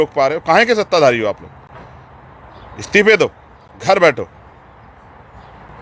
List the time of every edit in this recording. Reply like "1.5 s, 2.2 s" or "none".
none